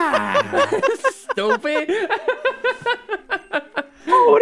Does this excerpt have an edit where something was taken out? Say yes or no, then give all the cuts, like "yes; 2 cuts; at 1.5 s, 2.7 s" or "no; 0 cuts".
no; 0 cuts